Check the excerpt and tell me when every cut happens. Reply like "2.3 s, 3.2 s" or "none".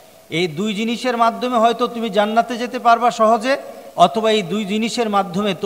3.8 s